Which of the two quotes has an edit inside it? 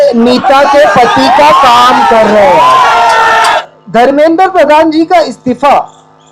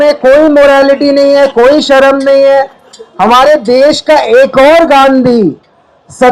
first; 1 cut; at 3.6 s

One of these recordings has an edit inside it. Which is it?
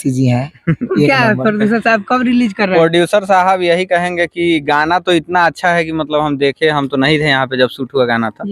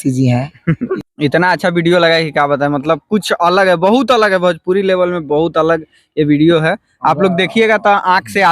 second; 1 cut; at 0.9 s

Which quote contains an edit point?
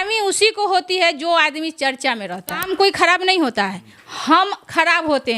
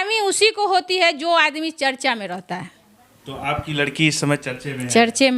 first; 1 cut; at 2.6 s

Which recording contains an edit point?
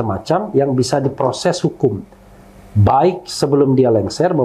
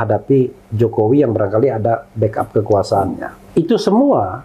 second; 1 cut; at 3.4 s

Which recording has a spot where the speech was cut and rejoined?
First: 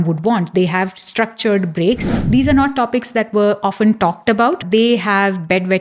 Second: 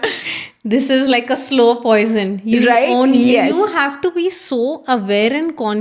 first; 2 cuts; at 2.1 s, 4.6 s

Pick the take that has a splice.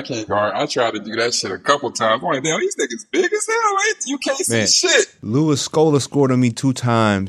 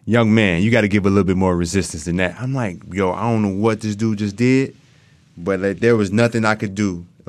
first; 1 cut; at 5.2 s

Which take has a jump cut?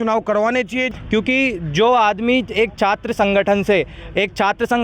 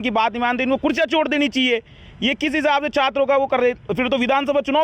first; 1 cut; at 0.9 s

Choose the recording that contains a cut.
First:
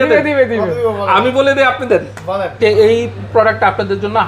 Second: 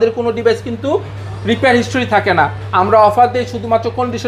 first; 1 cut; at 2.6 s

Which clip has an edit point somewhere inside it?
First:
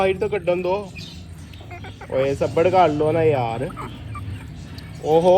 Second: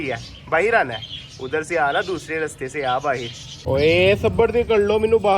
second; 1 cut; at 3.5 s

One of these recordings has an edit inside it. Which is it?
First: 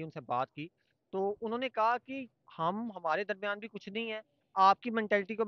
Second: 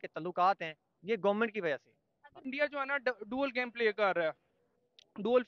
second; 1 cut; at 2.4 s

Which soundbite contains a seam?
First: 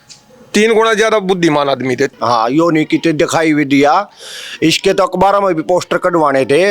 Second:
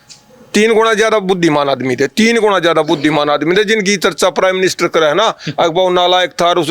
first; 1 cut; at 2.1 s

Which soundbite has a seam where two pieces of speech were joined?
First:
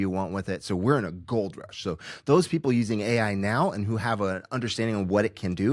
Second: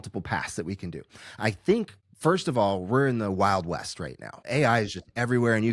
second; 2 cuts; at 2.0 s, 4.4 s

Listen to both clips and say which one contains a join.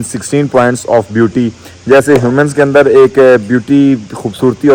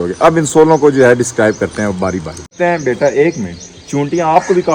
second; 1 cut; at 2.5 s

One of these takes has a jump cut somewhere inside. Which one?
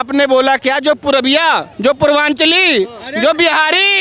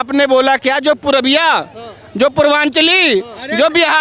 first; 1 cut; at 1.7 s

